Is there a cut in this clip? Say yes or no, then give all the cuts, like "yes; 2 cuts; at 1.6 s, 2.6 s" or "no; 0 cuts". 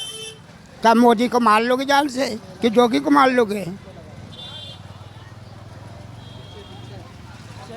no; 0 cuts